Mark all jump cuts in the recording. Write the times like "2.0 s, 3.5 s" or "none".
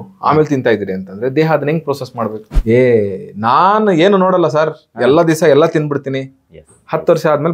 2.5 s